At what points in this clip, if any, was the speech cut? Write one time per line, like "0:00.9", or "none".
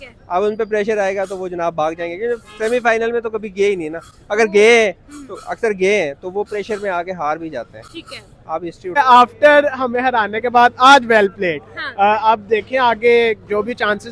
none